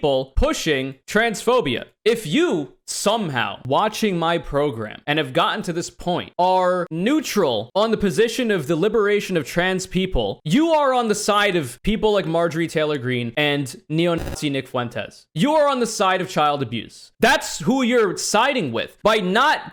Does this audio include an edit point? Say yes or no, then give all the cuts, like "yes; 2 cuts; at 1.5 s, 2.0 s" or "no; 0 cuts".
no; 0 cuts